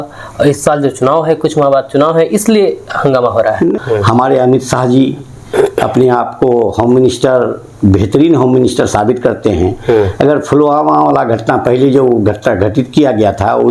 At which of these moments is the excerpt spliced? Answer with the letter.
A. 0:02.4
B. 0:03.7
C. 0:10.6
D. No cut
B